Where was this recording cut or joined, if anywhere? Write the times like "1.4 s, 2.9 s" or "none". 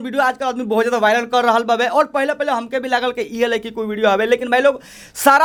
none